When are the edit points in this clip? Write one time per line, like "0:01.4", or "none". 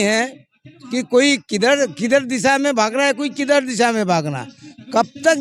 none